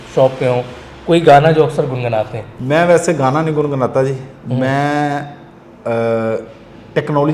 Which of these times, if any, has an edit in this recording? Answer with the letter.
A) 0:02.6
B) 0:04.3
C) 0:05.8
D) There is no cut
D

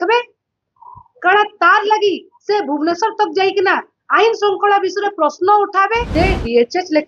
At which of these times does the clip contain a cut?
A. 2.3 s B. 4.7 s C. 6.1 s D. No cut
C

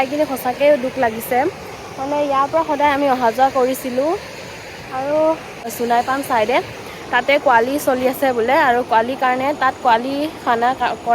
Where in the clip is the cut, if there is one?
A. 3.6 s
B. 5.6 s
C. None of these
B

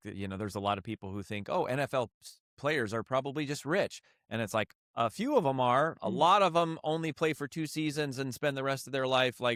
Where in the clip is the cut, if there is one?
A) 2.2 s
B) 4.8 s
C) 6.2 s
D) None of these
D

